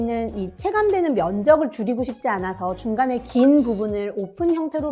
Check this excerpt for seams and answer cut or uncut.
uncut